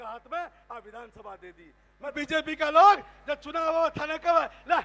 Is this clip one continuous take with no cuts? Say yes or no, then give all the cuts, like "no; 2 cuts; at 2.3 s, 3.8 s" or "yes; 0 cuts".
no; 1 cut; at 2.1 s